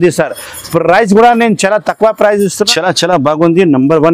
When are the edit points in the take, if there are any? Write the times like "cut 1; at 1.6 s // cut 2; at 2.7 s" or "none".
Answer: cut 1; at 2.7 s